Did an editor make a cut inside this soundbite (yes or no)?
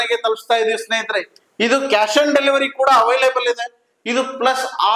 no